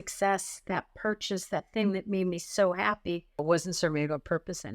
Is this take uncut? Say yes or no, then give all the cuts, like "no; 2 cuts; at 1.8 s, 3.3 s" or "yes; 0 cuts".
no; 1 cut; at 3.4 s